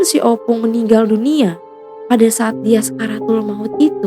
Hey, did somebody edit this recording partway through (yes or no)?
no